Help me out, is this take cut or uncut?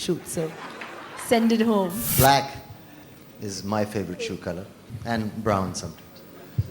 cut